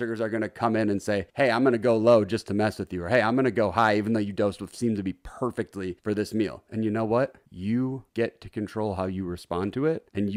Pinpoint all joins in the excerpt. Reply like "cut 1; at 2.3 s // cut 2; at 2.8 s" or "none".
none